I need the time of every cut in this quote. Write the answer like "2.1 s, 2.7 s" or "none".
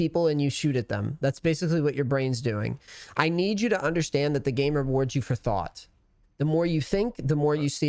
none